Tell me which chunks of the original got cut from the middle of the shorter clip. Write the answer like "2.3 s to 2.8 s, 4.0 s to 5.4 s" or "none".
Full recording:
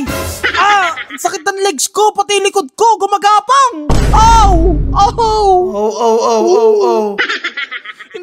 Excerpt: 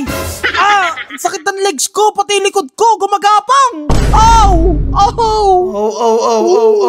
none